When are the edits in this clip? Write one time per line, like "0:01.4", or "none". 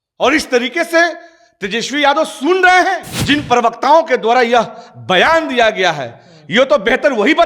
0:03.1